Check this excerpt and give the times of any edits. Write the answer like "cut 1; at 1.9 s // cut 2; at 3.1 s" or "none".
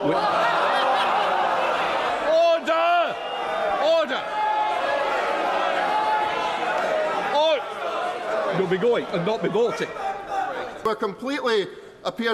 cut 1; at 2.1 s // cut 2; at 10.8 s

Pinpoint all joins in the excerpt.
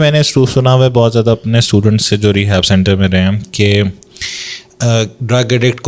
none

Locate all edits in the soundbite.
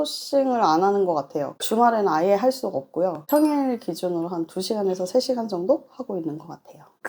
cut 1; at 1.6 s

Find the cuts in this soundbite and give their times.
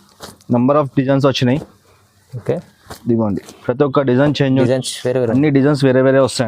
cut 1; at 4.6 s

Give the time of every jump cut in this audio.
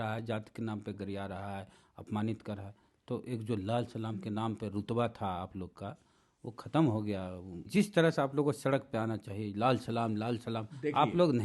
cut 1; at 7.7 s

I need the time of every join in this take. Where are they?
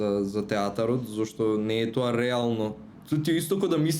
cut 1; at 2.9 s

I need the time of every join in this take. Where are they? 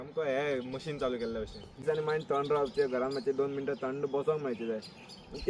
cut 1; at 1.7 s

